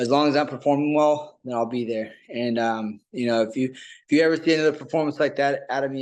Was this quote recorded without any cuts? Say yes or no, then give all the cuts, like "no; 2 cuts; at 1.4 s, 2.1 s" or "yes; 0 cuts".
yes; 0 cuts